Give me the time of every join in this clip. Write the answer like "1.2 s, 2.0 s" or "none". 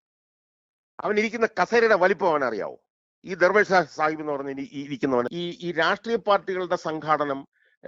5.3 s